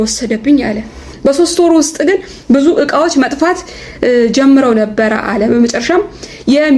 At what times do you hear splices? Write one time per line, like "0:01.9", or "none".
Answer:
0:01.1